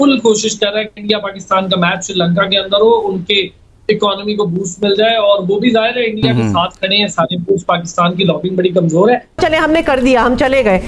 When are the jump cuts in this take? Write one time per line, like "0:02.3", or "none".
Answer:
0:09.4